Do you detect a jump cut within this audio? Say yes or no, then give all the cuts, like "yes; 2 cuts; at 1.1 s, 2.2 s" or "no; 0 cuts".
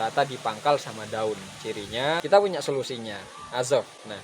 yes; 1 cut; at 2.2 s